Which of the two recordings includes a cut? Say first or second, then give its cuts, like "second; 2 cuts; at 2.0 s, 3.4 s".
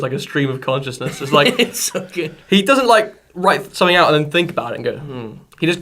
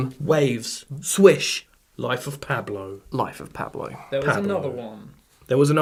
first; 1 cut; at 3.7 s